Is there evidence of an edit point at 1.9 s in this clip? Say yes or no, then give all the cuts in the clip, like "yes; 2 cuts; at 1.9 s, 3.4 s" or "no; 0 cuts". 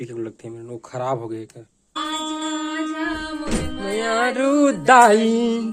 yes; 1 cut; at 1.9 s